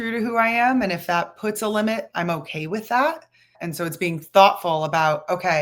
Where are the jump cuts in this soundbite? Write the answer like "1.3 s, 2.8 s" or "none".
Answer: 3.6 s